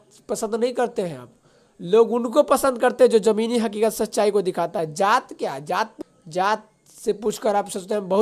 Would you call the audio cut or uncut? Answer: cut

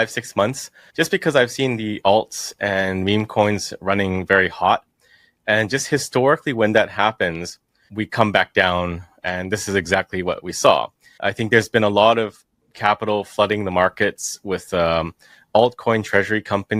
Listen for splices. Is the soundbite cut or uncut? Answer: uncut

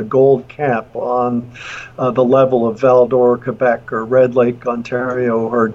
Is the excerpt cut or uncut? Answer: uncut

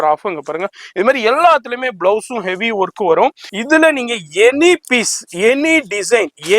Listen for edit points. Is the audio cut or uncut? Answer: cut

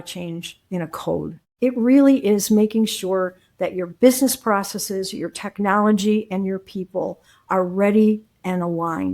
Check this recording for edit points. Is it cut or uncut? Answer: cut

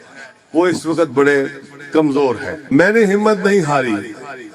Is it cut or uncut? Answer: cut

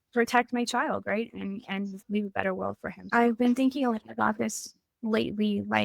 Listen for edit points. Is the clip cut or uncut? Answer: cut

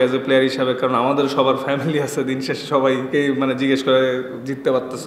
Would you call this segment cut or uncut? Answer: cut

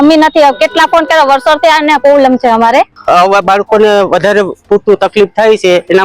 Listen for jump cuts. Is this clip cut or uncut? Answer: cut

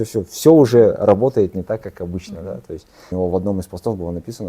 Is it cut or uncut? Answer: cut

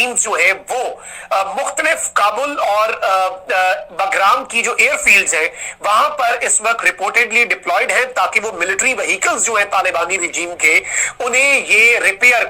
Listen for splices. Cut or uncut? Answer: uncut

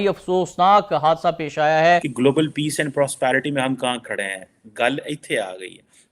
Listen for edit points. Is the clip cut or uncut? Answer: cut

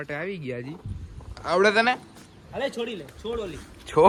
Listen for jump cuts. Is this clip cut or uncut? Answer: uncut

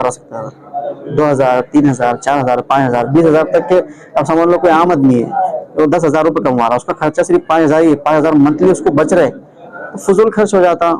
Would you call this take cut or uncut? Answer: uncut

